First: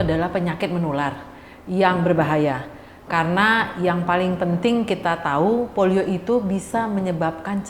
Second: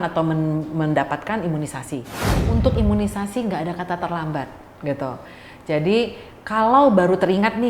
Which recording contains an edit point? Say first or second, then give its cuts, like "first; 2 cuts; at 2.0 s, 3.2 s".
second; 1 cut; at 2.3 s